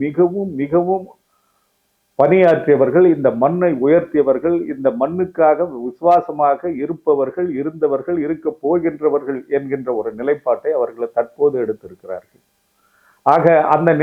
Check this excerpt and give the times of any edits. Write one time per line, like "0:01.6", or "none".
none